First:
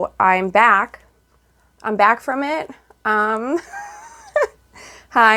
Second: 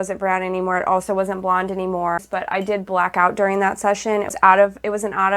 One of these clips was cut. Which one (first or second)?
second